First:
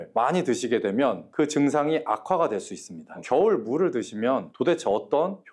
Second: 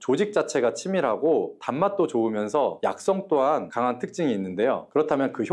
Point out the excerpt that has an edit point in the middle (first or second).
first